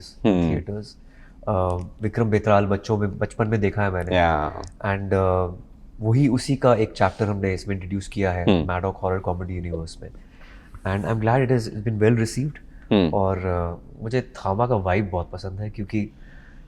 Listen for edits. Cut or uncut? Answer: uncut